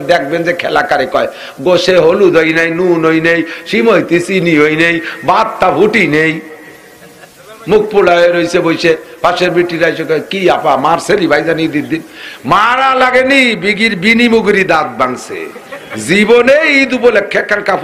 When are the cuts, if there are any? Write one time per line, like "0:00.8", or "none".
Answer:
none